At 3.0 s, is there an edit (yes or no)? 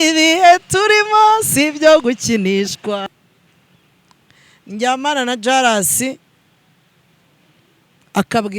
yes